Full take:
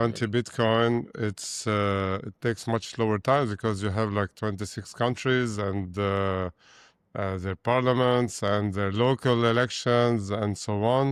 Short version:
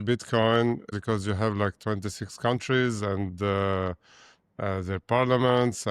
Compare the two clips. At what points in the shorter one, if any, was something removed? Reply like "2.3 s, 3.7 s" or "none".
0.9 s